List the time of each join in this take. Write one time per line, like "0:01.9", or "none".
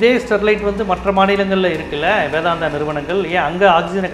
none